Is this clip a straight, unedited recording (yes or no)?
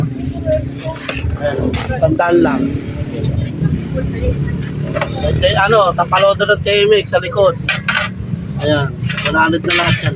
yes